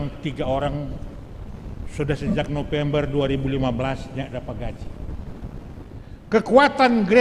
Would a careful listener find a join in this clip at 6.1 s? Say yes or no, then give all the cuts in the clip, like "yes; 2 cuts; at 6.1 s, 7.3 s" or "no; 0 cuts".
yes; 1 cut; at 6.1 s